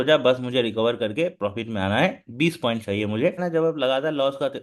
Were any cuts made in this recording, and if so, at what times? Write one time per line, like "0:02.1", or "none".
0:03.4